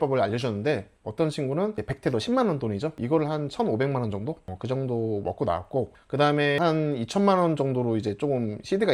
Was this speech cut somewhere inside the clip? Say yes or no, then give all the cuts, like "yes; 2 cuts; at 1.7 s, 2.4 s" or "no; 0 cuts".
yes; 3 cuts; at 1.0 s, 3.0 s, 6.6 s